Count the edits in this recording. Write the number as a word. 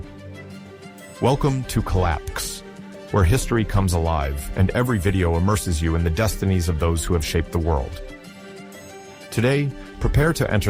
one